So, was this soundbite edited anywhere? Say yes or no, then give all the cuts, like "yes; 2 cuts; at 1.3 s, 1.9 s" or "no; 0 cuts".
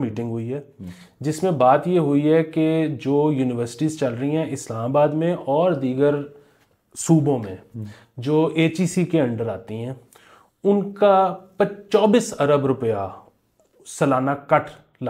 no; 0 cuts